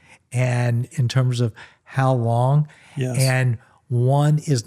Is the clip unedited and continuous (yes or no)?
no